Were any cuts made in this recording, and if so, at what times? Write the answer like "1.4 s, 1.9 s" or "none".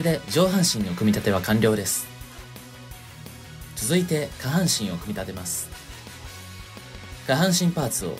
2.0 s, 3.8 s, 5.5 s, 7.3 s